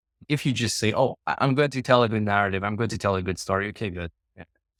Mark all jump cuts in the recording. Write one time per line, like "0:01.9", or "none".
none